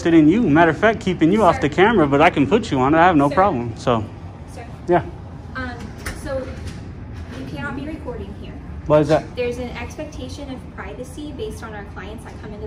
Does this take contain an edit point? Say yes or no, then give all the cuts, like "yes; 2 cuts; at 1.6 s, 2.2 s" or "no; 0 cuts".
no; 0 cuts